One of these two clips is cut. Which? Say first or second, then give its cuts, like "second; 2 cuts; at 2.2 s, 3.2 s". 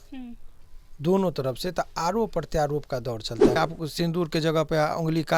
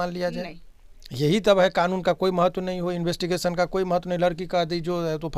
first; 1 cut; at 3.6 s